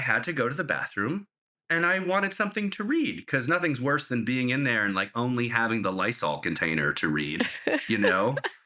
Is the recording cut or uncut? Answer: uncut